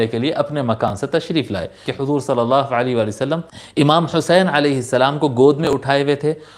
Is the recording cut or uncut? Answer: cut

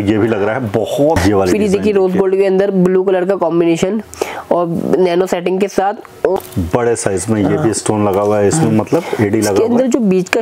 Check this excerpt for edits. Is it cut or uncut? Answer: cut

